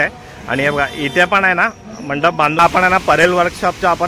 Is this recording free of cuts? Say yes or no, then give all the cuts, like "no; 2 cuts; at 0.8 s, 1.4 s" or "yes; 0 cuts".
no; 1 cut; at 2.6 s